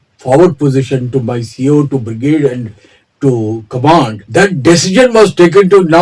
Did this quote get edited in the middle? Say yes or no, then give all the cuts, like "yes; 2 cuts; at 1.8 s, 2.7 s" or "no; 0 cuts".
yes; 1 cut; at 4.2 s